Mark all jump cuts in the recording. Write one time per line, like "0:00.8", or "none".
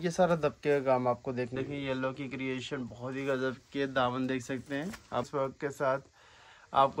0:01.5
0:05.3